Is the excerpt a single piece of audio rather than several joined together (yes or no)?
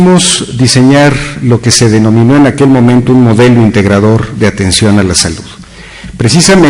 no